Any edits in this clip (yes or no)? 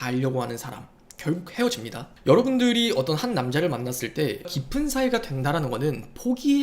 yes